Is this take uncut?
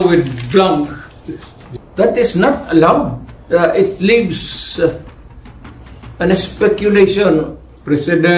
yes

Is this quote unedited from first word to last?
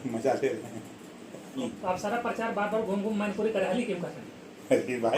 no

